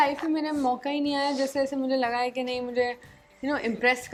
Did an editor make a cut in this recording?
no; 0 cuts

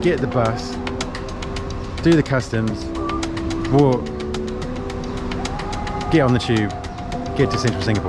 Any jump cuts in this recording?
no; 0 cuts

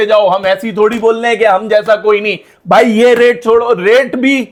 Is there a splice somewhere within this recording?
no; 0 cuts

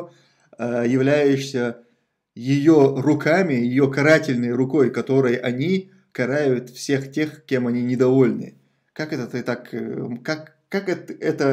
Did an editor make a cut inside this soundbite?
no; 0 cuts

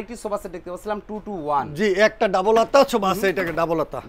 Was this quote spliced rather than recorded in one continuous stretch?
no; 0 cuts

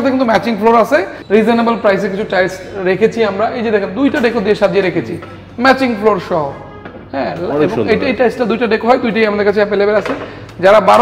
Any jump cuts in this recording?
yes; 1 cut; at 1.1 s

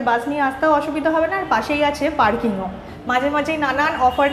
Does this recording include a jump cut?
yes; 1 cut; at 2.9 s

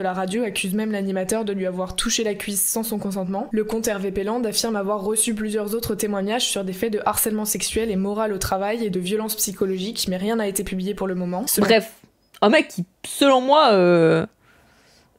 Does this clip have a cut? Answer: no; 0 cuts

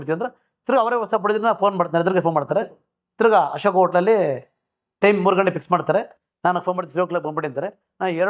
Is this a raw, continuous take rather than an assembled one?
yes; 0 cuts

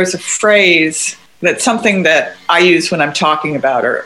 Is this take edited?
yes; 1 cut; at 1.5 s

